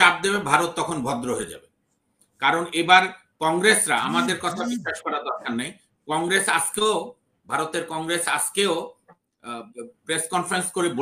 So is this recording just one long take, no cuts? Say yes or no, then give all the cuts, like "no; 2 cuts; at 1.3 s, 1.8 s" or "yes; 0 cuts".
yes; 0 cuts